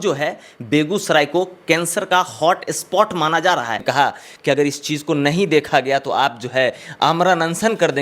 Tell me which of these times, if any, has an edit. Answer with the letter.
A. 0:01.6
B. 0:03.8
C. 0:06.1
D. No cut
B